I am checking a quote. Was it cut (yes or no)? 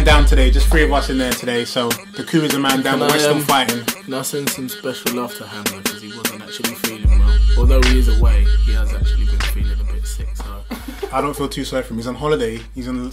no